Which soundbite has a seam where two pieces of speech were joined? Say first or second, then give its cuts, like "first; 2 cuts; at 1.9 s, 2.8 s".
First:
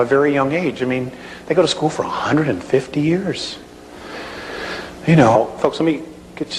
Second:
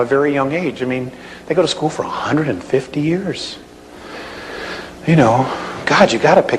second; 1 cut; at 5.4 s